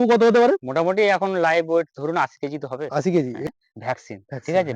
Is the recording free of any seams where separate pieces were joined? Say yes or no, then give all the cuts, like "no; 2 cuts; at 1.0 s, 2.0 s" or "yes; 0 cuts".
no; 1 cut; at 3.5 s